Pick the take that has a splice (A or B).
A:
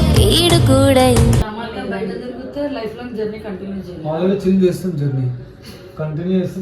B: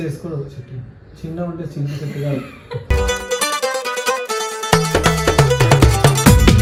A